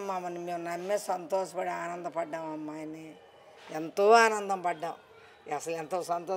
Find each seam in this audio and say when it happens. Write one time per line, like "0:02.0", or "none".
none